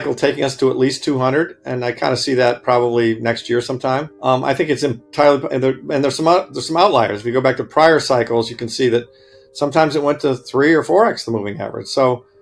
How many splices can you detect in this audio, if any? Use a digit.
1